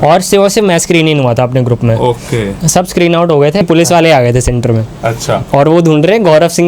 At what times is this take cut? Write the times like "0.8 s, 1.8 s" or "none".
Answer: 3.6 s